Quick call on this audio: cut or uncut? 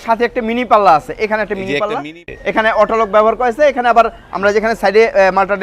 cut